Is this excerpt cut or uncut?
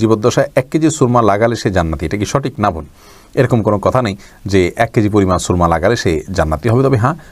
uncut